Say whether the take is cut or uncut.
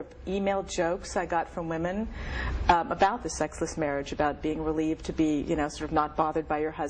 cut